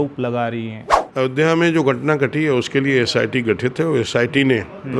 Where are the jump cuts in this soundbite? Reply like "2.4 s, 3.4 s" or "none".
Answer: 1.0 s